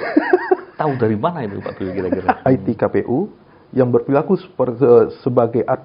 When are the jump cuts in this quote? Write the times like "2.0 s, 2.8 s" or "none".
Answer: 2.4 s